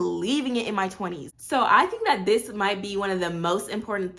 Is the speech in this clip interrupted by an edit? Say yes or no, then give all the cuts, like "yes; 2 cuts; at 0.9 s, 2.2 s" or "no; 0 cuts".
yes; 1 cut; at 1.2 s